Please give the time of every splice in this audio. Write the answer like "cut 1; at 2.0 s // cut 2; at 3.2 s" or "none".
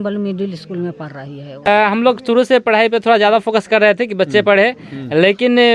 cut 1; at 1.7 s